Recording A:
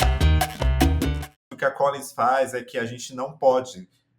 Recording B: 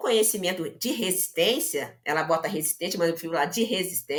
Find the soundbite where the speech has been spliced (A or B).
A